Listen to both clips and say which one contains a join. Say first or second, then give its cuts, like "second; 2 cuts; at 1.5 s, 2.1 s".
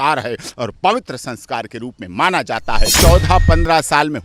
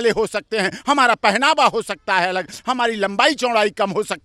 first; 1 cut; at 2.9 s